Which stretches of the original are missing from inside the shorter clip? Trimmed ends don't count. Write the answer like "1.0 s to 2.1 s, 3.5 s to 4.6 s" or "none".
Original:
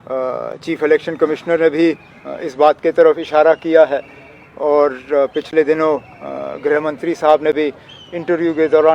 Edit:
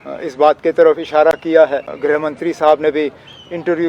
4.1 s to 6.5 s